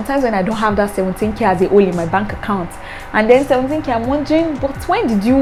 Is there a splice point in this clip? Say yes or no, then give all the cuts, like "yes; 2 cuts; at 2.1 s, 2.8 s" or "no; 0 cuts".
no; 0 cuts